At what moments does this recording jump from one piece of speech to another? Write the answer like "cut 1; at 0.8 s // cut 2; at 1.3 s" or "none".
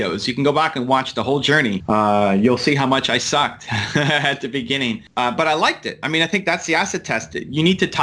cut 1; at 1.8 s // cut 2; at 4.8 s